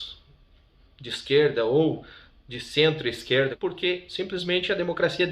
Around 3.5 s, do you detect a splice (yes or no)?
yes